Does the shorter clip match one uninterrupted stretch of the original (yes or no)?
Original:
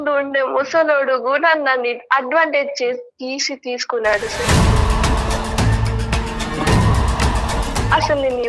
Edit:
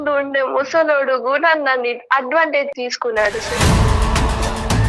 no